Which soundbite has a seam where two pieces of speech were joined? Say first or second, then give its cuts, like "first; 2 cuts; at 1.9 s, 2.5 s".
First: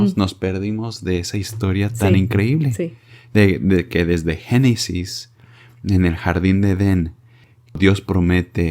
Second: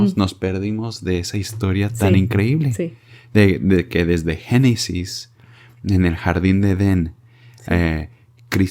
first; 1 cut; at 7.7 s